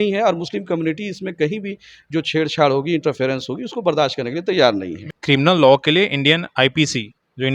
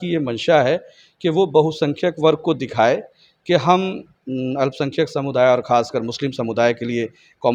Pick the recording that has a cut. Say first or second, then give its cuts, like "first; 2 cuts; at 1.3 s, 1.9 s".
first; 1 cut; at 5.0 s